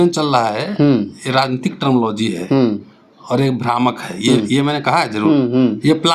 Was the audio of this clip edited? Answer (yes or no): no